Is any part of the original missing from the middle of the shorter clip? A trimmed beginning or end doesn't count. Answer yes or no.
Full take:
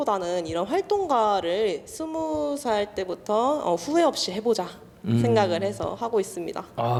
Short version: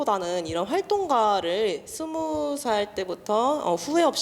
no